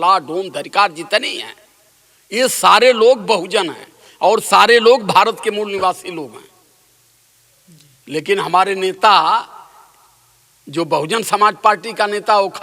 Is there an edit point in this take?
no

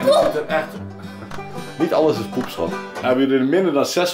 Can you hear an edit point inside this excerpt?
yes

